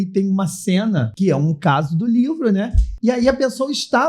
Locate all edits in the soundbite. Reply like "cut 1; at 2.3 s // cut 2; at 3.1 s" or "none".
cut 1; at 1.1 s // cut 2; at 2.8 s